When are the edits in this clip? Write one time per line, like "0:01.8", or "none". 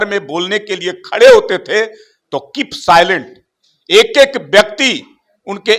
none